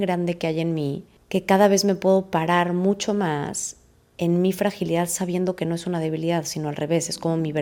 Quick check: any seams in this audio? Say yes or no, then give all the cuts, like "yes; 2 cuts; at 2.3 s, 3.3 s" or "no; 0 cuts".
no; 0 cuts